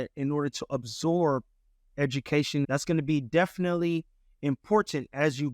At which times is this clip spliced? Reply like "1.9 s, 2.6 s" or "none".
2.7 s